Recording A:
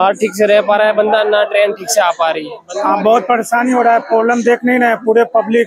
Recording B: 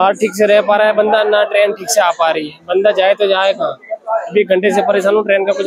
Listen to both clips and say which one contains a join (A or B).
A